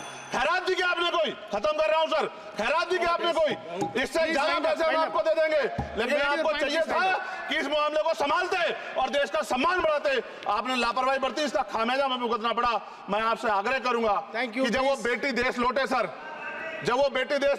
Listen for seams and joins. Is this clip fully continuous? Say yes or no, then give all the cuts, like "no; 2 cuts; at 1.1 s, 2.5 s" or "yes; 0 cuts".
yes; 0 cuts